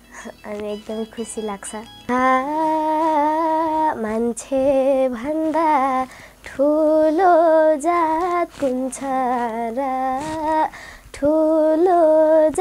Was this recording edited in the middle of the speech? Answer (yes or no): yes